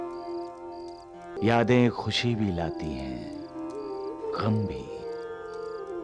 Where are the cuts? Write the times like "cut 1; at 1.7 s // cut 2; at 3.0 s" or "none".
cut 1; at 1.3 s